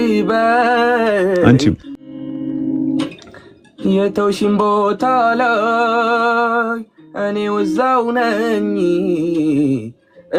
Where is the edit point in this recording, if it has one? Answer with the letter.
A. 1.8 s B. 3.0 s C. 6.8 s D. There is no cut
D